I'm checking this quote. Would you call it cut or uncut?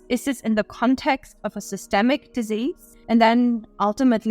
cut